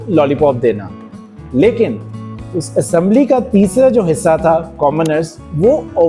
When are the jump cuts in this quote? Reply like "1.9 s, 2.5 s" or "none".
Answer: none